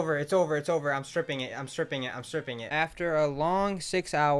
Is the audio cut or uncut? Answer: cut